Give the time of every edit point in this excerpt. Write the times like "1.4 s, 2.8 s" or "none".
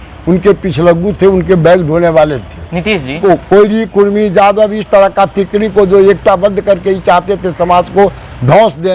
3.2 s